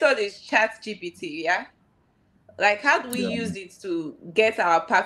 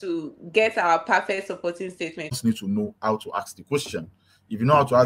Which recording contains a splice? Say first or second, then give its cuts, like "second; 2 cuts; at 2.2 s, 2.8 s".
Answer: second; 1 cut; at 2.3 s